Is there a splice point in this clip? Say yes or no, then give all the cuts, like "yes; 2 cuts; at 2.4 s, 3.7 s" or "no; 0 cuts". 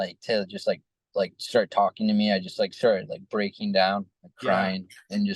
no; 0 cuts